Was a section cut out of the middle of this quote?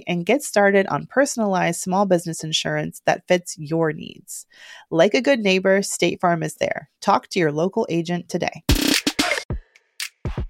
yes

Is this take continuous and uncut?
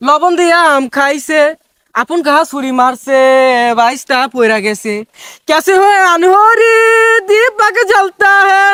yes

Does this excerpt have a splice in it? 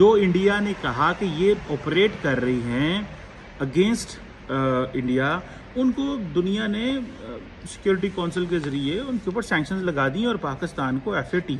no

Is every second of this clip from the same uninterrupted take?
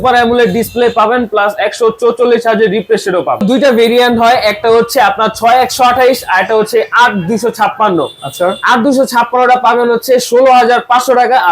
no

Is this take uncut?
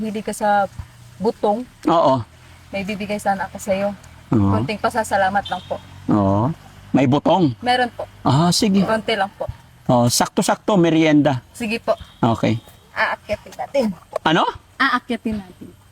yes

